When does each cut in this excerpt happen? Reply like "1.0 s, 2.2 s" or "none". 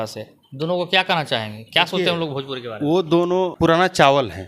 3.5 s